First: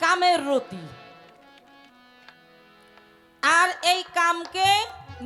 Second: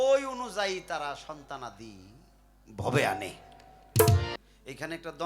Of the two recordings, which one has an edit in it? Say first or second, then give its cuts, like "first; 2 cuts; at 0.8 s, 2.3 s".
second; 1 cut; at 4.3 s